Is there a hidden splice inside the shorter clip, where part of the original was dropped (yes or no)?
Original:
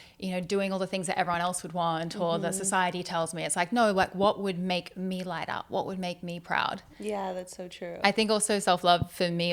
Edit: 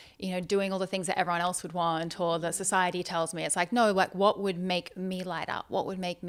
no